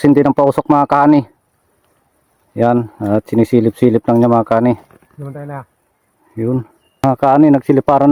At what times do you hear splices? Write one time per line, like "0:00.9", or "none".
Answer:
0:07.0